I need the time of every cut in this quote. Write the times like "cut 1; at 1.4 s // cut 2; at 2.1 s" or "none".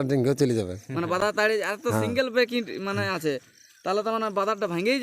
none